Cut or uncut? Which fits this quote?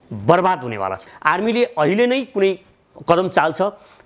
cut